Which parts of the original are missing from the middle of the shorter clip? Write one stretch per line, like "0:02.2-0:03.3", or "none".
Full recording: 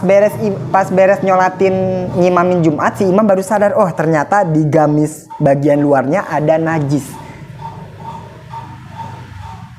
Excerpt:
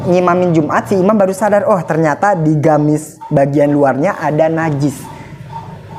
none

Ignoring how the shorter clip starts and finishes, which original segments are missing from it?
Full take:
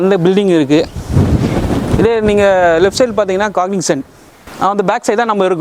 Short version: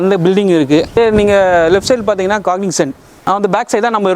0:01.0-0:02.1
0:04.2-0:04.4

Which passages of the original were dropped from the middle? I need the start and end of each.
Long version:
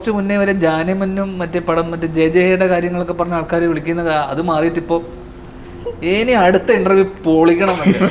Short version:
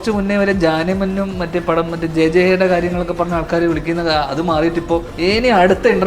0:05.1-0:05.9

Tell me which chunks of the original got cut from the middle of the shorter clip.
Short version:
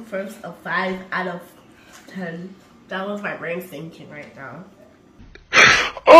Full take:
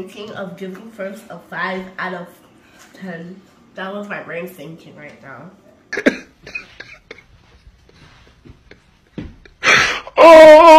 0:06.0-0:09.2

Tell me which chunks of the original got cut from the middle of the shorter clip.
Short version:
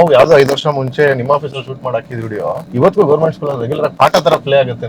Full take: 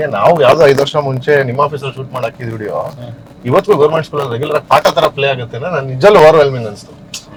0:02.9-0:03.3

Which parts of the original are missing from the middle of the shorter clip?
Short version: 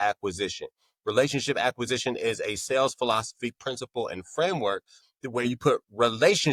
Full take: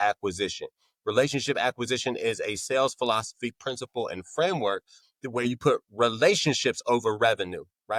none

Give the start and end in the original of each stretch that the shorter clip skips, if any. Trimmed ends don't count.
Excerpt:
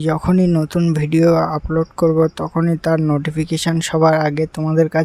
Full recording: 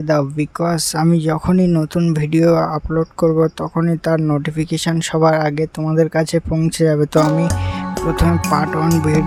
none

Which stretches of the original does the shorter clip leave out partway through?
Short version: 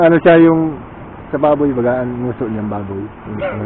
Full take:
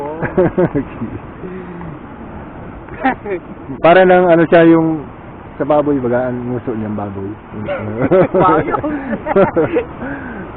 none

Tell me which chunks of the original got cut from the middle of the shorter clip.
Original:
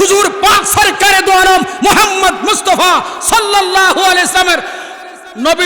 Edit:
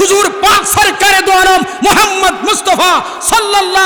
none

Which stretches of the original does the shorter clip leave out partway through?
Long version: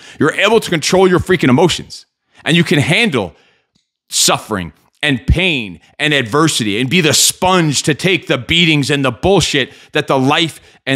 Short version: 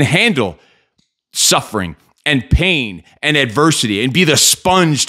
none

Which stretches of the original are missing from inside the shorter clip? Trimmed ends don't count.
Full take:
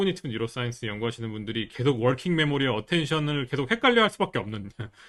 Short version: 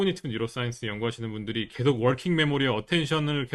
none

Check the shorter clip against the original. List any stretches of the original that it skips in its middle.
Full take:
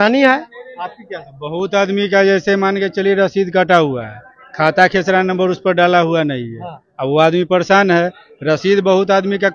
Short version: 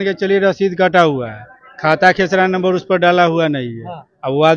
none

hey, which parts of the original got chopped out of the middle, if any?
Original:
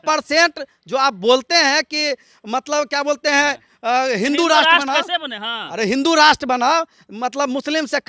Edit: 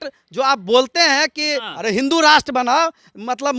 0:02.2-0:05.6

